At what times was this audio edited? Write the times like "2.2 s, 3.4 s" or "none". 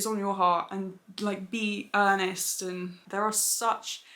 3.0 s

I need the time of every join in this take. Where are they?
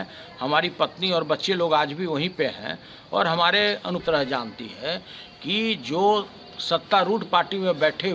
4.0 s

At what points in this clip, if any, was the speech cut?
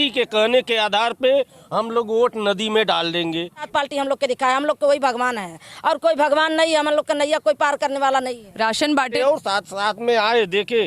3.7 s, 9.2 s

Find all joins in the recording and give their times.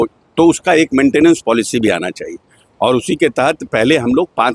none

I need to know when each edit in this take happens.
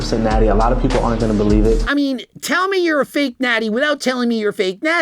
1.8 s

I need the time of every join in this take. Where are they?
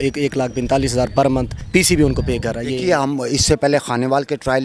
1.6 s, 2.6 s

